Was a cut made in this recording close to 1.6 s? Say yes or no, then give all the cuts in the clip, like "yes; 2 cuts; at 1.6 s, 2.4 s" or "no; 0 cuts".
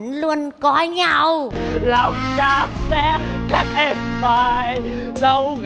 yes; 1 cut; at 1.6 s